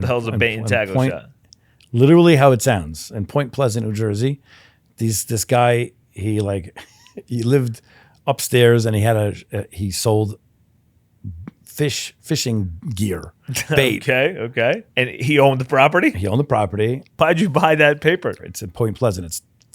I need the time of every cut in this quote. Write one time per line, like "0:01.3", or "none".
0:15.0
0:17.2
0:18.4